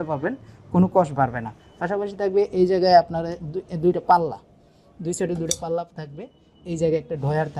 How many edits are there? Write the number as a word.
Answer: zero